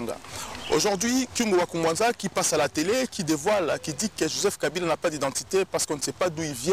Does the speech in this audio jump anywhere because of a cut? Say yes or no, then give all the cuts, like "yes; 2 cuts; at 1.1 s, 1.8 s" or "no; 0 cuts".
no; 0 cuts